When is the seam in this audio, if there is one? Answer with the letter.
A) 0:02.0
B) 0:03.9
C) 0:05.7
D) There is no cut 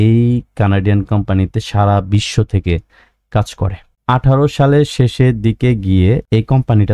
B